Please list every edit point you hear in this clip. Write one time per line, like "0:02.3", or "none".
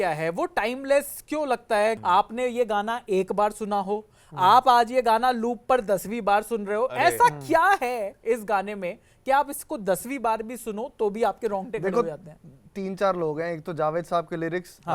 0:02.0